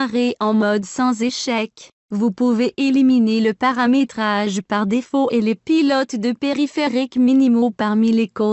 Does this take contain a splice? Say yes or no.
yes